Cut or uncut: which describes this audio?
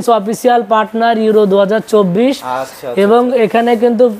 uncut